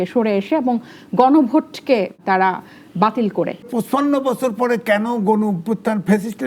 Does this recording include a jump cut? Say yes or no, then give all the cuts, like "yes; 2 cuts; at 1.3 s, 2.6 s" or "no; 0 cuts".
yes; 1 cut; at 3.7 s